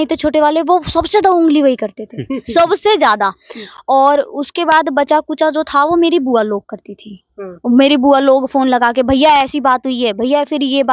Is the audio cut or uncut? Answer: uncut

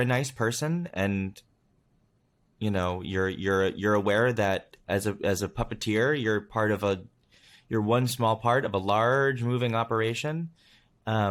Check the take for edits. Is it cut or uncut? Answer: uncut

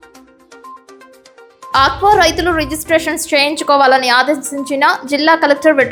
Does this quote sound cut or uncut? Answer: uncut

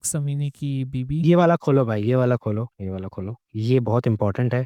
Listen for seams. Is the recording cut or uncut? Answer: uncut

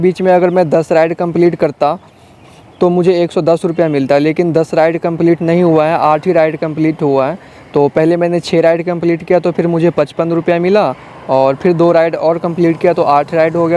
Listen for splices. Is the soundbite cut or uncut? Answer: uncut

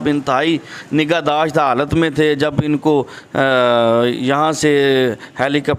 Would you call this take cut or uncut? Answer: uncut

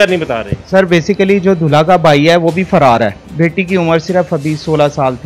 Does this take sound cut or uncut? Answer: cut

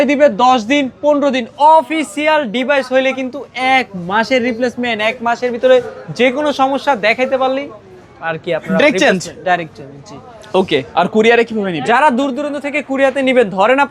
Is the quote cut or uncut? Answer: uncut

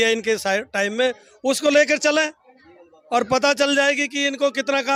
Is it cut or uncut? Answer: uncut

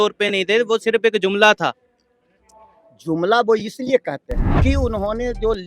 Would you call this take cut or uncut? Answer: cut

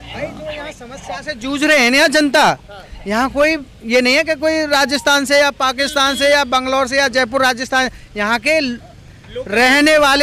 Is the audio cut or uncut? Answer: uncut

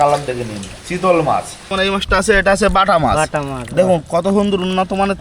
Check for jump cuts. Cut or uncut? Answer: cut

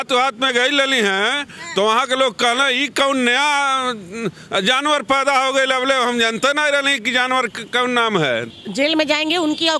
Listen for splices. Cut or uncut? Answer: cut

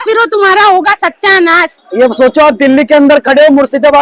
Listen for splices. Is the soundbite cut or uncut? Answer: cut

